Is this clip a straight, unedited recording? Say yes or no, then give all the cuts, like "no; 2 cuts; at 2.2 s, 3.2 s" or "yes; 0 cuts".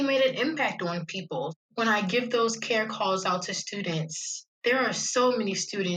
no; 1 cut; at 1.6 s